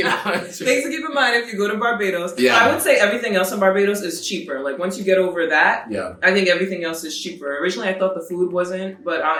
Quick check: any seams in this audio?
no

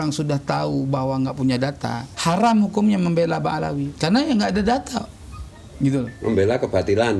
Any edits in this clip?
yes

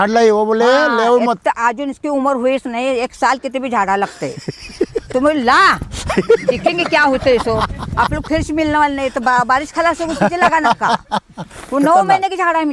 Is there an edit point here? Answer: no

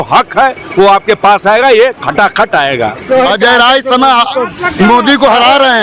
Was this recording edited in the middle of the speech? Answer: yes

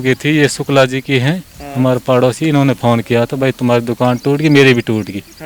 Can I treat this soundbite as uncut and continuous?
yes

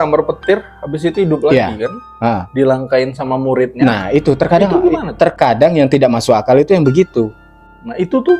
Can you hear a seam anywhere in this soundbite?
no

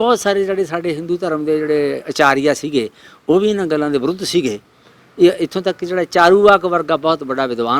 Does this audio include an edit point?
no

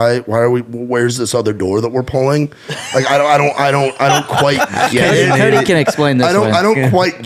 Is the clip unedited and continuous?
yes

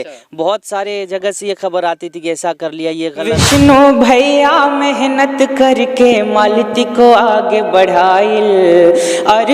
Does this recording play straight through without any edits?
no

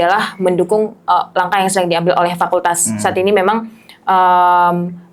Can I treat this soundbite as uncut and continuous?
yes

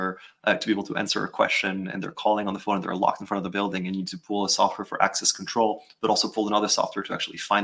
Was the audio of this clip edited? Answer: no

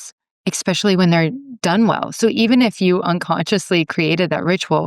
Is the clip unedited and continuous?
no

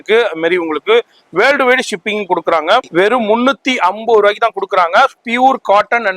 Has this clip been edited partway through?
yes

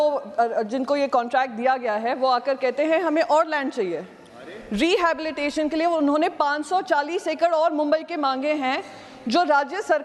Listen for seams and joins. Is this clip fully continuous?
yes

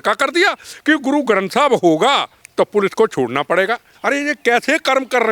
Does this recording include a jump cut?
yes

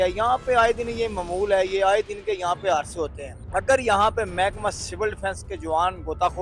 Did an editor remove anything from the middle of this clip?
no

